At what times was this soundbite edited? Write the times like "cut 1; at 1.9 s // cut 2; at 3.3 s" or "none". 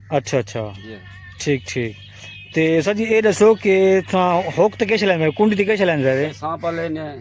none